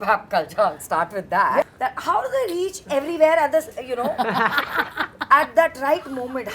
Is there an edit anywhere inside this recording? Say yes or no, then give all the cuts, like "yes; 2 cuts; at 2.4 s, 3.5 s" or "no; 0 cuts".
yes; 1 cut; at 1.6 s